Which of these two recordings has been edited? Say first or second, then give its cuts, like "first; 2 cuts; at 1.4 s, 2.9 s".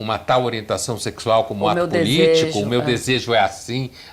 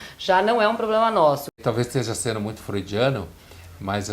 second; 1 cut; at 1.5 s